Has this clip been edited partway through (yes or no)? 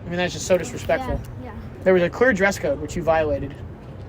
yes